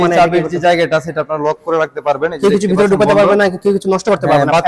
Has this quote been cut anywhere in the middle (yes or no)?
no